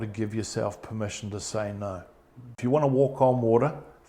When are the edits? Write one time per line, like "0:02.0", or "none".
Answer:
0:02.6